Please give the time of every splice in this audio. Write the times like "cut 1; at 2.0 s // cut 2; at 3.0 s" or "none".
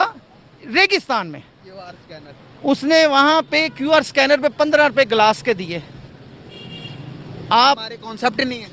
none